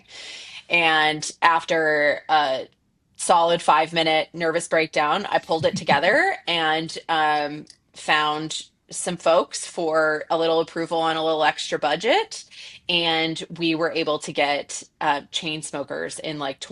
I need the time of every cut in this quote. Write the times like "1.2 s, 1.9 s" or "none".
none